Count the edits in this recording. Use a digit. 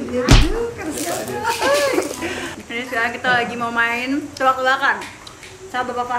1